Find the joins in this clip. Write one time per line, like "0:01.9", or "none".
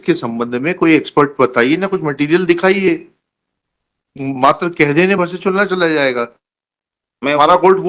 none